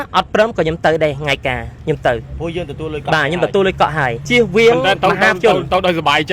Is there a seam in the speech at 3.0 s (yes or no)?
no